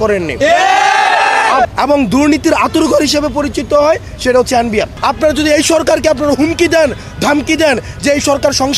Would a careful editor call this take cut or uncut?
cut